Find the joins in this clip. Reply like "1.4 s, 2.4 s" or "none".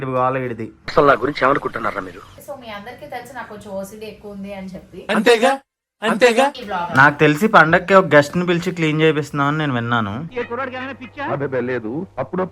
2.3 s, 6.6 s